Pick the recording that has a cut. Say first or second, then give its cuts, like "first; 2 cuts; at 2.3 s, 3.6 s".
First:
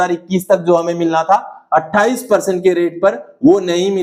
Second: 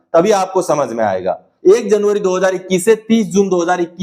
second; 1 cut; at 1.4 s